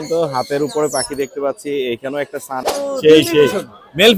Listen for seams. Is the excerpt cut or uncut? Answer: cut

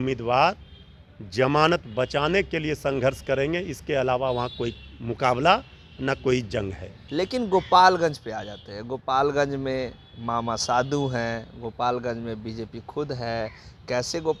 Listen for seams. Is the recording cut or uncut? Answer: uncut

